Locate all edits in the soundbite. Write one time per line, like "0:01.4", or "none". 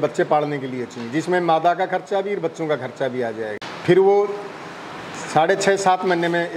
none